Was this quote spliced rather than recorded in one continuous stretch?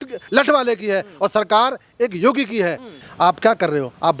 yes; 1 cut; at 3.0 s

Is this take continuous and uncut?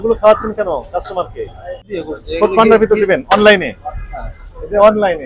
no; 1 cut; at 1.9 s

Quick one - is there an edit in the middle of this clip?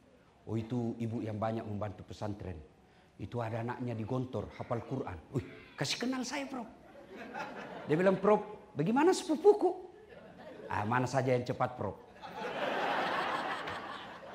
no; 0 cuts

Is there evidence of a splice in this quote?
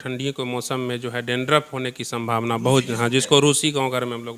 no; 0 cuts

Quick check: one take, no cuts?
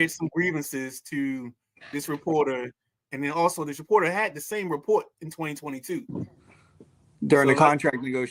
yes; 0 cuts

